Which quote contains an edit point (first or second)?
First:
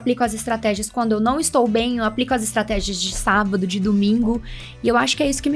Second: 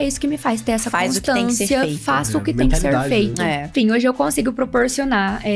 second